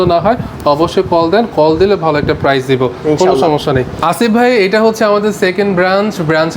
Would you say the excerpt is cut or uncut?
uncut